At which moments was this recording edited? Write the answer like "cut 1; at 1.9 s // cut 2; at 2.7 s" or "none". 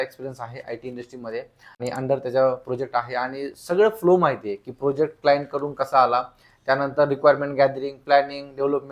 cut 1; at 1.6 s

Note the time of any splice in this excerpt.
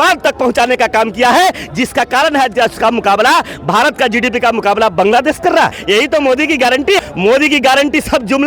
cut 1; at 5.8 s // cut 2; at 7.0 s

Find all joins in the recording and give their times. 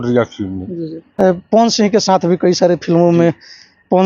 cut 1; at 1.1 s

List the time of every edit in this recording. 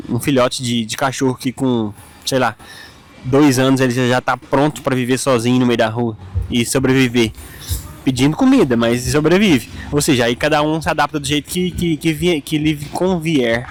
none

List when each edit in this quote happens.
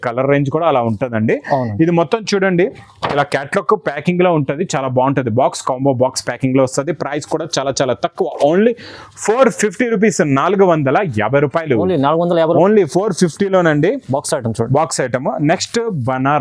none

